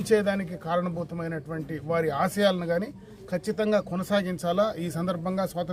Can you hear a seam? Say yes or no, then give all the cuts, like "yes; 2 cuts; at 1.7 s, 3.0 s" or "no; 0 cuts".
no; 0 cuts